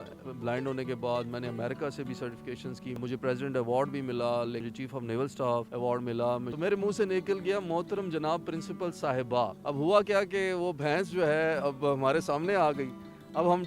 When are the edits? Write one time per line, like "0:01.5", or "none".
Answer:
0:02.9
0:04.7
0:06.5
0:09.6